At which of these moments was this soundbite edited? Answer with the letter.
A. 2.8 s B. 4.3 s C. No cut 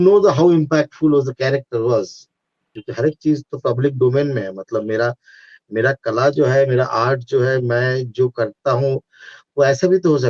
A